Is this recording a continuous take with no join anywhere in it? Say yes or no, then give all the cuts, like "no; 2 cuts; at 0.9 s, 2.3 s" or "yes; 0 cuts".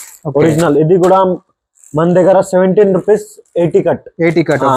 yes; 0 cuts